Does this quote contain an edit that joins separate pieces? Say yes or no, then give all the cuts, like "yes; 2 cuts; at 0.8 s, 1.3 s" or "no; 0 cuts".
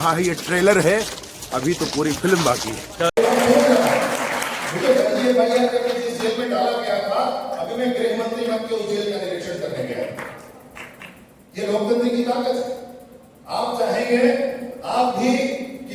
yes; 1 cut; at 3.2 s